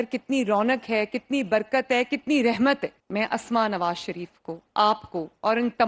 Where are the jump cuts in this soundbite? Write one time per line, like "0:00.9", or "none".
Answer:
0:03.0